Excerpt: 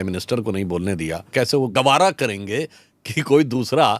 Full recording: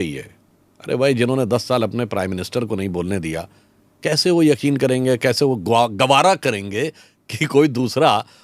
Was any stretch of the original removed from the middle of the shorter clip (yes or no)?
yes